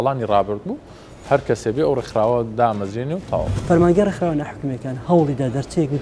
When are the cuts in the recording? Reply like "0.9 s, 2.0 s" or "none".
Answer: 3.5 s